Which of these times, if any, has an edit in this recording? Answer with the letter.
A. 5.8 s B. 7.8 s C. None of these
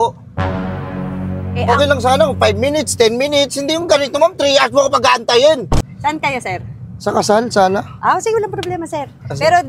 A